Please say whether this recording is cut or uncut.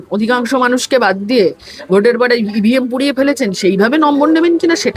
uncut